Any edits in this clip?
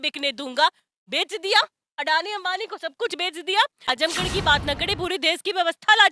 yes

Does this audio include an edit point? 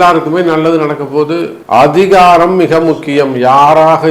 yes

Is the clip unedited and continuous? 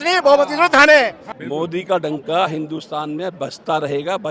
no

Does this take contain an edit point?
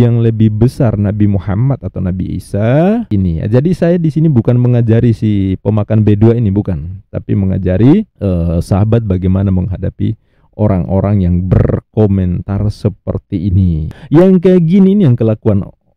yes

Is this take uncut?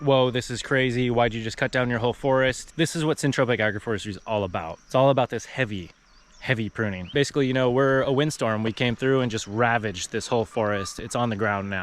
no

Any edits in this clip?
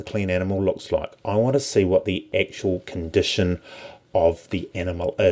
yes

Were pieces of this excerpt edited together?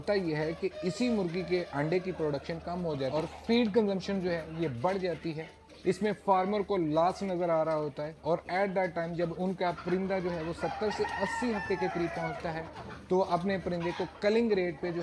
no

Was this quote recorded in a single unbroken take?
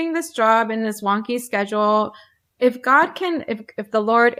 yes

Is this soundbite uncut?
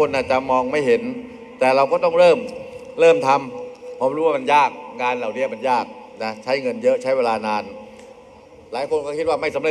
yes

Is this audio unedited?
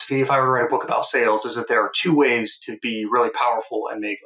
yes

